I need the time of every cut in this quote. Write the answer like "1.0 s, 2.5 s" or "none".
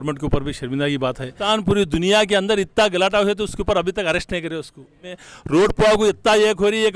1.4 s, 5.2 s